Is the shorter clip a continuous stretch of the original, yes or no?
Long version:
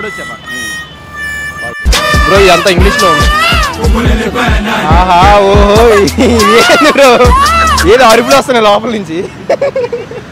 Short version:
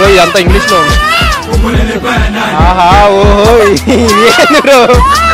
yes